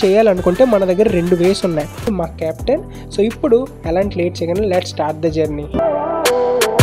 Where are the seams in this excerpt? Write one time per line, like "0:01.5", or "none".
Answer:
0:02.1
0:05.8